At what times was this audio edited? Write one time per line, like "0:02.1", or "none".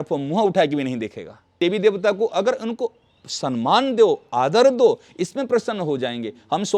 0:01.5